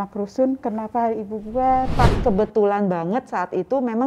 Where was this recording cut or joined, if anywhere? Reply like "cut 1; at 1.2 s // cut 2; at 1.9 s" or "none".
cut 1; at 1.9 s